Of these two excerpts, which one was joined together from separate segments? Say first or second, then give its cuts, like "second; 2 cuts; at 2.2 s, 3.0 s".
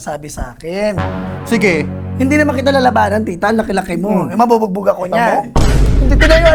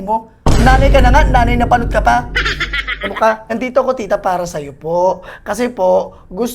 second; 1 cut; at 3.4 s